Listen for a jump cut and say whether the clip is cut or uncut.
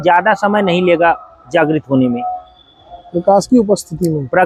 uncut